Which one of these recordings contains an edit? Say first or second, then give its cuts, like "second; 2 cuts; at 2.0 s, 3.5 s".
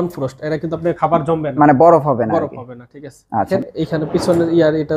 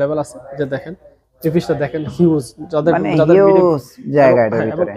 first; 1 cut; at 3.5 s